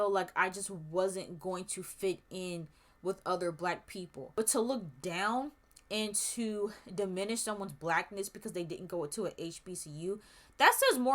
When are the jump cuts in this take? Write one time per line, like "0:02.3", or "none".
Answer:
0:04.2

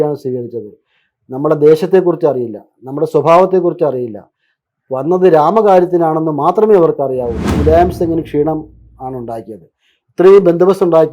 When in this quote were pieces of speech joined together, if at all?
0:07.5

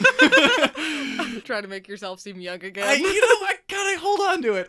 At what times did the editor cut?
0:01.4

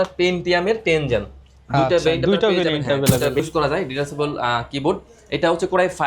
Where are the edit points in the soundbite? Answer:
0:03.4

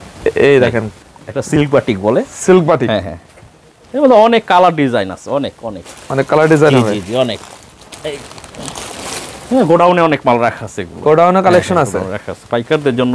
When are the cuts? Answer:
none

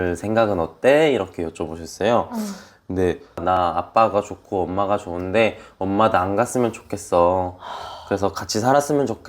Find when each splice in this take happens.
0:03.4

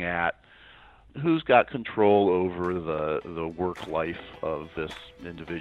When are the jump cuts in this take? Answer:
0:04.7

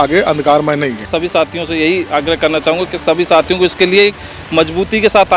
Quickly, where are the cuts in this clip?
0:01.0

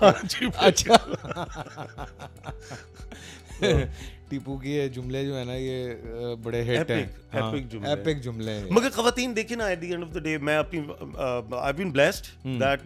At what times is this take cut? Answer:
none

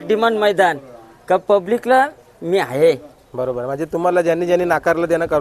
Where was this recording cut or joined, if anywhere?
none

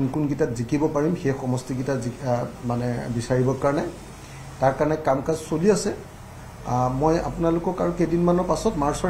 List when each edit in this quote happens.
none

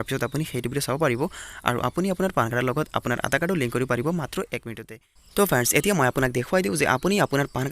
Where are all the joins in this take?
0:04.7

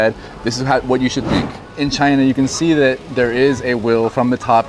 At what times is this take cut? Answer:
0:01.6

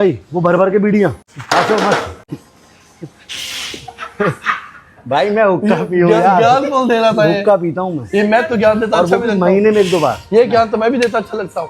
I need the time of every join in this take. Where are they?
0:01.3
0:02.3

